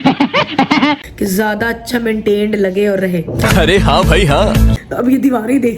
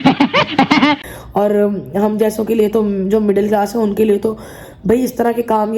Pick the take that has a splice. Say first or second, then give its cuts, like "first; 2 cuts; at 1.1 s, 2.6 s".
first; 2 cuts; at 1.1 s, 4.8 s